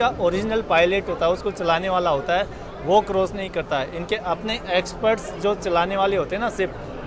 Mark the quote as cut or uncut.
uncut